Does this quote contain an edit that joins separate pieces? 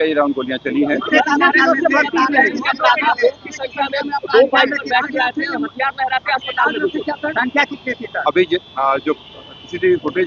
no; 0 cuts

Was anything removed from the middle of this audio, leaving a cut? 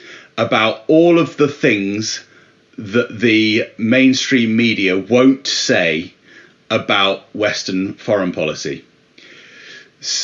no; 0 cuts

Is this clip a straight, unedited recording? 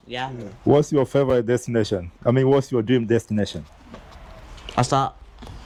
yes; 0 cuts

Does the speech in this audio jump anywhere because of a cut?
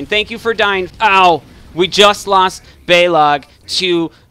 yes; 1 cut; at 0.9 s

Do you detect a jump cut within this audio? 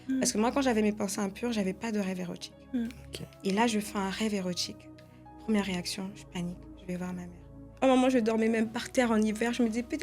yes; 1 cut; at 7.6 s

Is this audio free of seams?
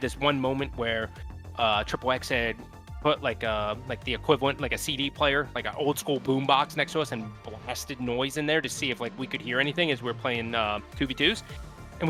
yes; 0 cuts

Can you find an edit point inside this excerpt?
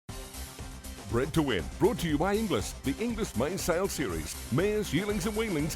yes; 1 cut; at 1.1 s

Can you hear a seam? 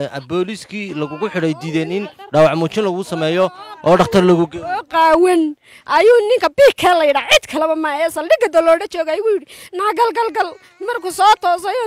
no; 0 cuts

